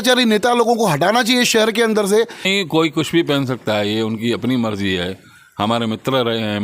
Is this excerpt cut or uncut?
cut